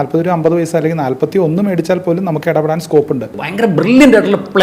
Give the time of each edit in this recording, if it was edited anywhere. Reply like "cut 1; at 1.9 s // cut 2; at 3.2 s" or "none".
cut 1; at 3.3 s